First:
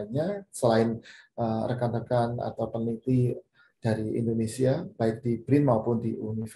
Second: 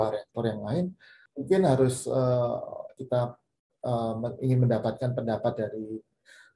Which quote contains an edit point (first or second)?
second